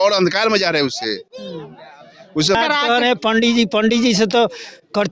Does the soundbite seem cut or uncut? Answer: cut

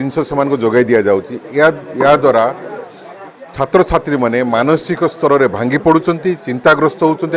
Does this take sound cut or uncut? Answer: uncut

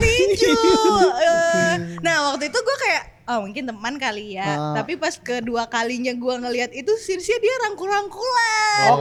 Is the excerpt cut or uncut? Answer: uncut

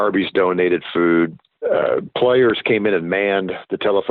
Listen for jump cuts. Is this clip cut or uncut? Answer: cut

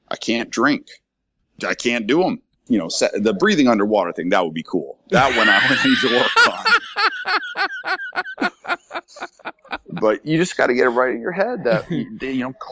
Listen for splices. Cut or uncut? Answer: cut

